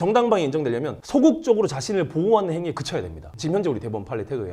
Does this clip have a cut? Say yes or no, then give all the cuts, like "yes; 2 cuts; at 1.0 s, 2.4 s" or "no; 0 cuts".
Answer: no; 0 cuts